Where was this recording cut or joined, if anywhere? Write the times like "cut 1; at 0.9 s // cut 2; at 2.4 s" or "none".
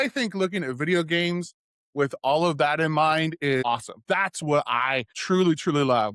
cut 1; at 3.6 s // cut 2; at 5.1 s